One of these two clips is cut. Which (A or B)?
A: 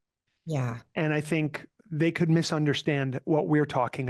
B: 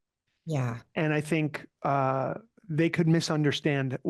A